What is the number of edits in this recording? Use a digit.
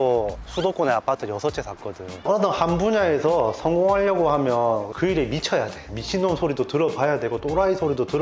1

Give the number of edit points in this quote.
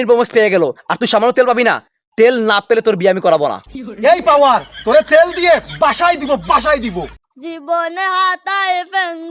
1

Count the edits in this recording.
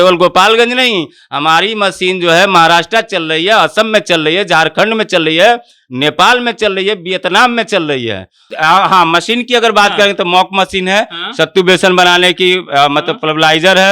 1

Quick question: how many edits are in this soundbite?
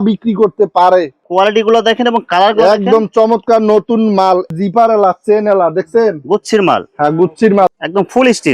3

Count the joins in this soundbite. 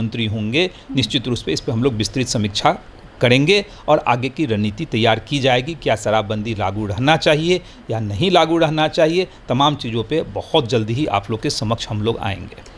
0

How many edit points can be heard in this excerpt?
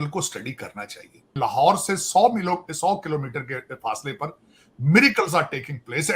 1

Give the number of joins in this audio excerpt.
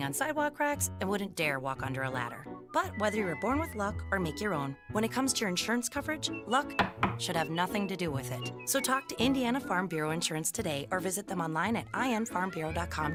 0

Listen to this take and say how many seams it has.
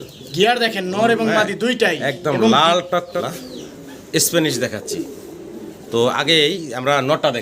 1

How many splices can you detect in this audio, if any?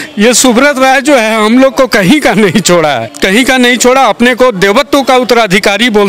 1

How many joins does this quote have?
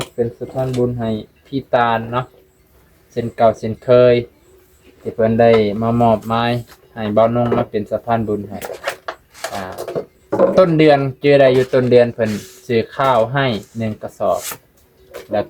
0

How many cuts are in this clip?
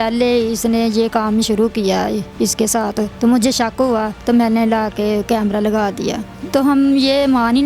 3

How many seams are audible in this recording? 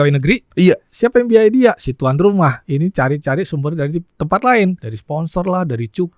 3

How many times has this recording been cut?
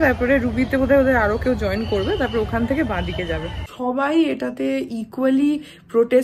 1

